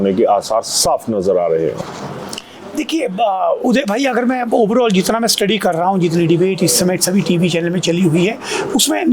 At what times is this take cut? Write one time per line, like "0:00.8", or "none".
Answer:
none